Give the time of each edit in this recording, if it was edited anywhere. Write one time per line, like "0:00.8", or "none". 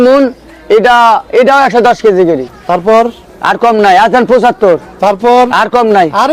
0:02.5